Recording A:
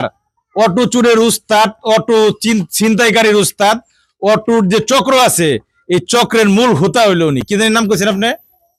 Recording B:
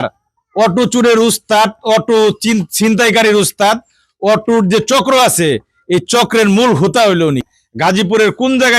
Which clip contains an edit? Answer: B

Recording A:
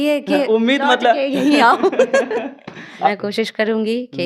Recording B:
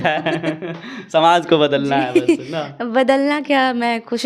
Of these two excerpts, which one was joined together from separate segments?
A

